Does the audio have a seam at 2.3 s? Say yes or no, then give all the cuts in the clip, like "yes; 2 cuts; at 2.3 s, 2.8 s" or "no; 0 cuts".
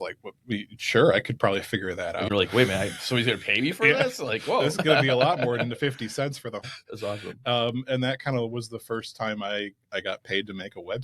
yes; 2 cuts; at 2.3 s, 6.7 s